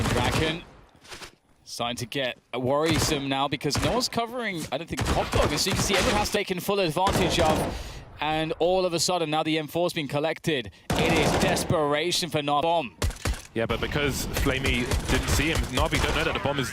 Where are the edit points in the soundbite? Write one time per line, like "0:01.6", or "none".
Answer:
0:06.4
0:12.6